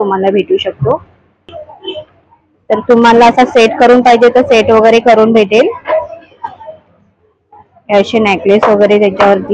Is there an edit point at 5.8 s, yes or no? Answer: no